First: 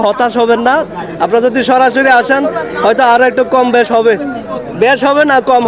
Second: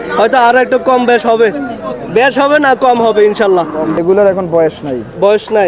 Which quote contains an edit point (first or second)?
second